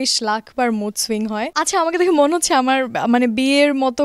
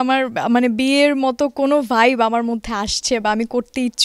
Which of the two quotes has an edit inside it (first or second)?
first